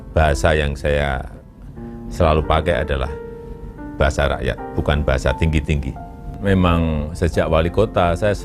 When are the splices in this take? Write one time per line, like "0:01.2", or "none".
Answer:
0:06.3

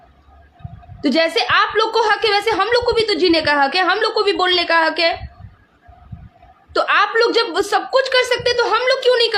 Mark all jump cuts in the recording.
none

